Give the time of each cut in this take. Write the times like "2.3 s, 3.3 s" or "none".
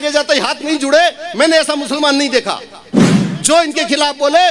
3.0 s